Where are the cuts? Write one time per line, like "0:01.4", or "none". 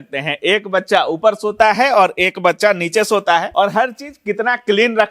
0:03.5